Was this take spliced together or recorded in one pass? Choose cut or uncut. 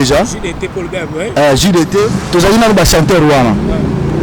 cut